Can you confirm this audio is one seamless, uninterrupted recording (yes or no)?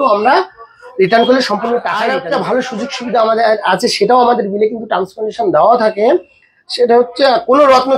no